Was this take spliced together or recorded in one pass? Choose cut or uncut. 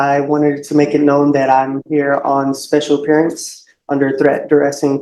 uncut